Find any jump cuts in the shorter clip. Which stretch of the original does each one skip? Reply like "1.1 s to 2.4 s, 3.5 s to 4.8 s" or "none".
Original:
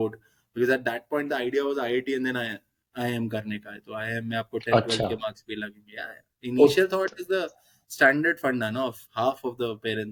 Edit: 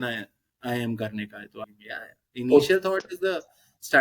4.0 s to 5.7 s